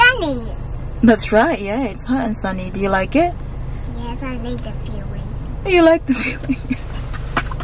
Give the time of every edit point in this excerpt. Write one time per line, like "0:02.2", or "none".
none